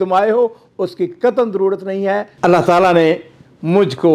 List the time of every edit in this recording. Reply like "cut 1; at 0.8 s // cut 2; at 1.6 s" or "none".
cut 1; at 2.3 s